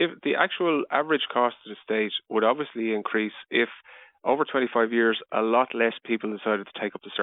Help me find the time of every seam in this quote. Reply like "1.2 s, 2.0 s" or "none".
none